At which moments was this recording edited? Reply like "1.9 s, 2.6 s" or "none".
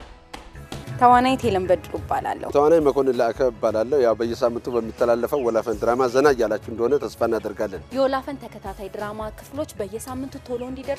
2.4 s